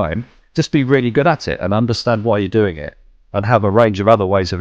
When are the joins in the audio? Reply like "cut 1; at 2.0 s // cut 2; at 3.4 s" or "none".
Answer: none